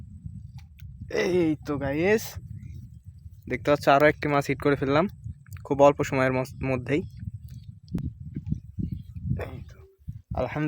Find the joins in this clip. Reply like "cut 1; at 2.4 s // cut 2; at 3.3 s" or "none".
cut 1; at 8.0 s